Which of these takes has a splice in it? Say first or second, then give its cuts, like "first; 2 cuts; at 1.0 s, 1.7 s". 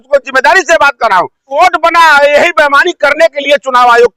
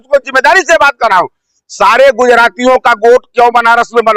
first; 1 cut; at 1.6 s